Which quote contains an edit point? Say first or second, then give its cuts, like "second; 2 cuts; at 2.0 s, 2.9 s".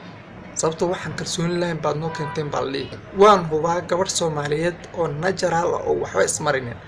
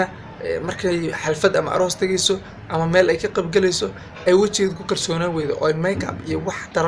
first; 1 cut; at 3.0 s